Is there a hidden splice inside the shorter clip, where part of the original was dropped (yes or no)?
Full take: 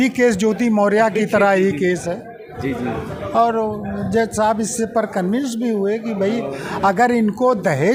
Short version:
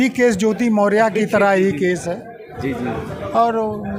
no